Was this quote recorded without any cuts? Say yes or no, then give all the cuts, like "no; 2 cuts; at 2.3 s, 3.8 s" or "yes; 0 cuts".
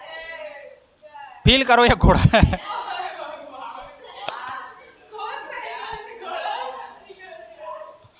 yes; 0 cuts